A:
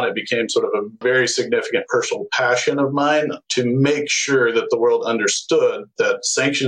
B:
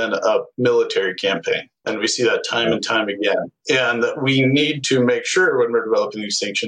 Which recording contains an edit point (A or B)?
A